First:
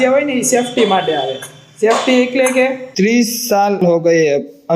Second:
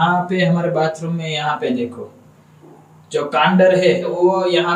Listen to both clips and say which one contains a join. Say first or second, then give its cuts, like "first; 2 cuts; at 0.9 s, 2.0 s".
first; 1 cut; at 2.8 s